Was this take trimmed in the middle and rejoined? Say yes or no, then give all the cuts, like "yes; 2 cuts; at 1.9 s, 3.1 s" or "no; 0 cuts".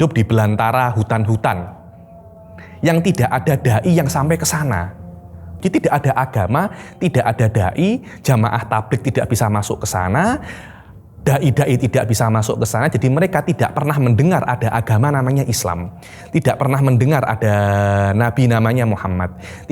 yes; 1 cut; at 5.6 s